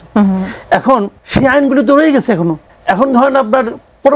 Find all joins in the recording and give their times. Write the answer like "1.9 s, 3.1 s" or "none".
1.2 s, 2.7 s